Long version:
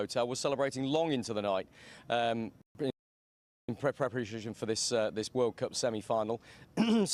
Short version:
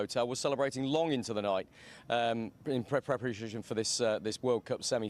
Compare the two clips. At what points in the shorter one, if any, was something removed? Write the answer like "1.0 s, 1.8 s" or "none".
2.6 s